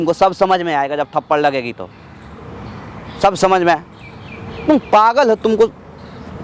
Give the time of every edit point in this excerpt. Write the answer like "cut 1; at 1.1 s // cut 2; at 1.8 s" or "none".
none